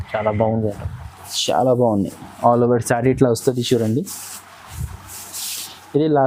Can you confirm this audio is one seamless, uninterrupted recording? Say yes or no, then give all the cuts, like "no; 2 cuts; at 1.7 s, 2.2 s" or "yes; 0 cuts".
yes; 0 cuts